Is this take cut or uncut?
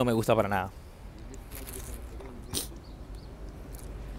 uncut